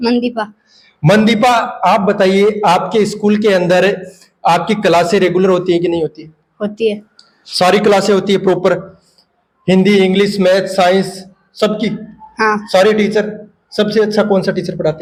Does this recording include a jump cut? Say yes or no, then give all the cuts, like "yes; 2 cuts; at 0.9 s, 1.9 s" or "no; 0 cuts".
no; 0 cuts